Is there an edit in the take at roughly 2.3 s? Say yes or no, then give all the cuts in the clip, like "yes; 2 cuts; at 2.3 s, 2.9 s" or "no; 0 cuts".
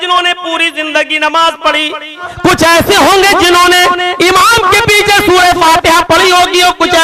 yes; 1 cut; at 2.3 s